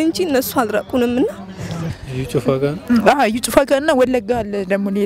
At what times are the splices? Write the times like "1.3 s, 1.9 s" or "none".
1.9 s